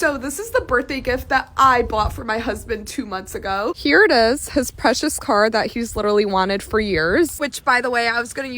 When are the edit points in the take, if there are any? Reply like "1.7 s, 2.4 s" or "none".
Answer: 4.4 s